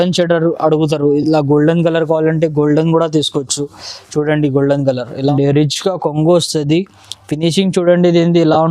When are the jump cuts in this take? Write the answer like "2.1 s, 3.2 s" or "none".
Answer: 5.3 s